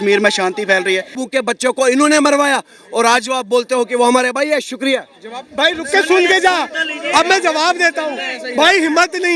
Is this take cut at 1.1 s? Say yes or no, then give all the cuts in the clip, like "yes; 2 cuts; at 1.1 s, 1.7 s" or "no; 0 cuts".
yes; 1 cut; at 1.1 s